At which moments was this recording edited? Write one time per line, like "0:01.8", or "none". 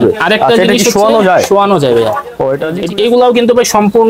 0:02.7

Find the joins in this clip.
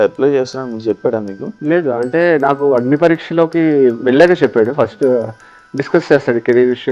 0:01.5

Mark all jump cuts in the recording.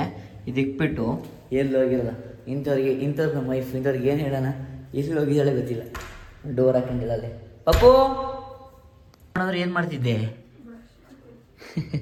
none

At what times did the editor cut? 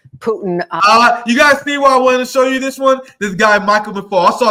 none

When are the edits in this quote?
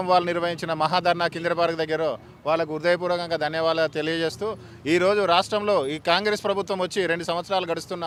none

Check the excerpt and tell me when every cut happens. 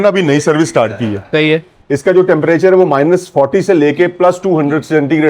0:01.7

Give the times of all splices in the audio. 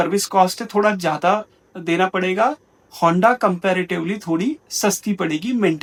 none

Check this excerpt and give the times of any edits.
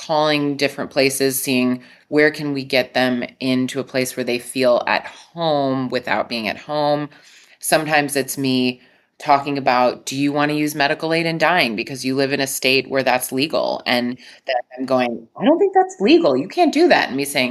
none

